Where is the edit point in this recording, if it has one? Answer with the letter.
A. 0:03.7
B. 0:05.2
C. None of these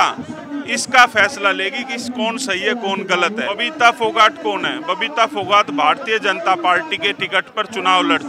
A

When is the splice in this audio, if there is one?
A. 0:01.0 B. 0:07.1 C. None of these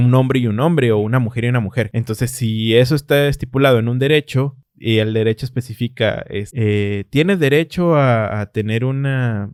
C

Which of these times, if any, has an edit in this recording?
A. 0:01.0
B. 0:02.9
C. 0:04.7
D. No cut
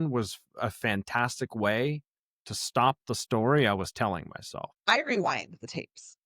C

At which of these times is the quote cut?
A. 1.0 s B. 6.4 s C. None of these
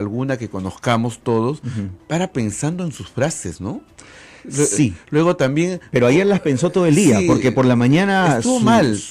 C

